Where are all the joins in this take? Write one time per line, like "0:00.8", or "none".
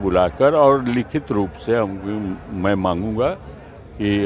none